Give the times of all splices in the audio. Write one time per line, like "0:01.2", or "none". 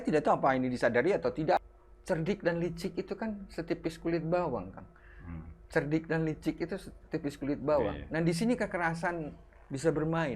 0:01.6